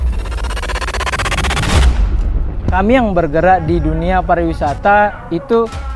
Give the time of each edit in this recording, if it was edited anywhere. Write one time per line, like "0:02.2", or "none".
0:02.2